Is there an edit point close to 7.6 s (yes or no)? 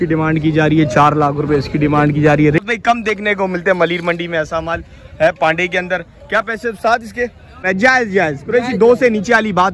yes